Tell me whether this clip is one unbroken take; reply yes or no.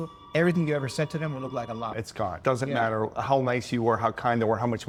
yes